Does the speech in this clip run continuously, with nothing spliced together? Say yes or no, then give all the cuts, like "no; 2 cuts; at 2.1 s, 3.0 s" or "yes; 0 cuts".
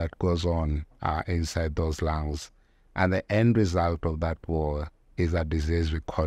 yes; 0 cuts